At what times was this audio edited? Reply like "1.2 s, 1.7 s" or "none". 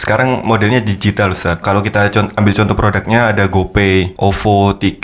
1.6 s, 4.1 s